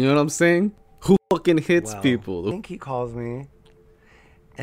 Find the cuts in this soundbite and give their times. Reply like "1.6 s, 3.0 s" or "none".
0.9 s, 2.5 s